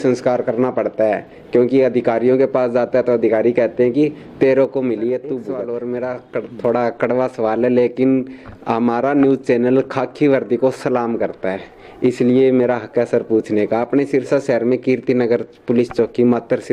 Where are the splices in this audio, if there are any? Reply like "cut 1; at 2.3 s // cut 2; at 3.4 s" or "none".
cut 1; at 5.5 s